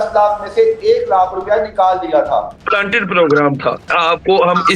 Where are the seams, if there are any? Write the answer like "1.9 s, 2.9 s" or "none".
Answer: 2.6 s, 3.9 s

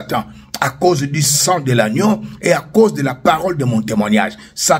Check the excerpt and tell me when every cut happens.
none

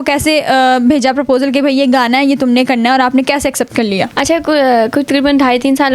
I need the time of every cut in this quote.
none

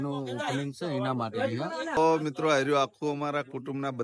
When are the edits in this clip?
2.0 s

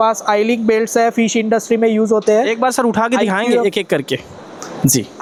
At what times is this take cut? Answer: none

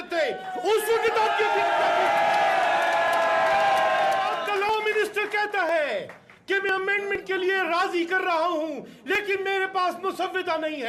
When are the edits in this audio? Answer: 4.4 s

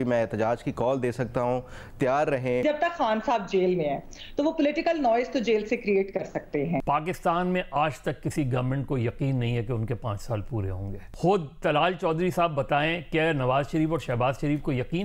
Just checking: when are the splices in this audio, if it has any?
2.6 s, 6.8 s, 11.0 s

